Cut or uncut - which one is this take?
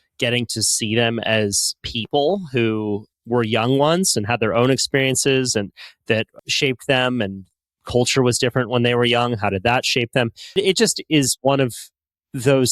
cut